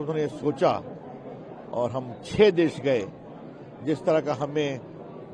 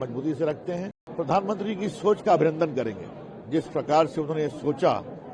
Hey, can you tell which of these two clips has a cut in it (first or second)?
second